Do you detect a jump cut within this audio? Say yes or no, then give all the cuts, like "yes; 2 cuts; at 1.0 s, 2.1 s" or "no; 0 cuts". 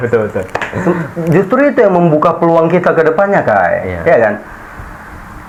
no; 0 cuts